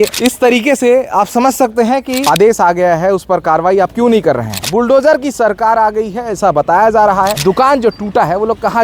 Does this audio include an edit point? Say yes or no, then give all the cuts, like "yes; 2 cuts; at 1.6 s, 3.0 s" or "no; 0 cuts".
yes; 3 cuts; at 2.2 s, 4.5 s, 7.3 s